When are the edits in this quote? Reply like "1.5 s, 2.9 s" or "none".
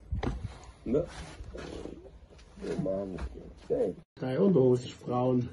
4.0 s